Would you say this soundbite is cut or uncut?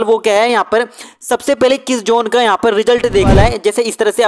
cut